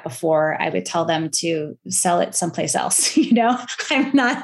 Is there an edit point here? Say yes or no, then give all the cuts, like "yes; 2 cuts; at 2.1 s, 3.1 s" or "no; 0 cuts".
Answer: no; 0 cuts